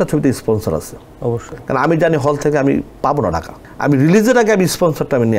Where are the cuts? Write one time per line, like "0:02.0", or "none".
none